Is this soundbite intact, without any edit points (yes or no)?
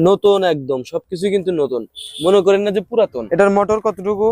no